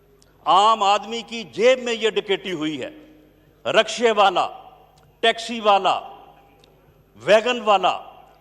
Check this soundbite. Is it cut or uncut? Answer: uncut